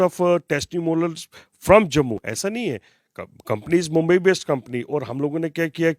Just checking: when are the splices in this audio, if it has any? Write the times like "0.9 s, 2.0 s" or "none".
none